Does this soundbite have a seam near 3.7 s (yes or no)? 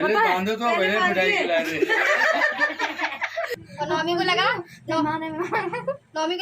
yes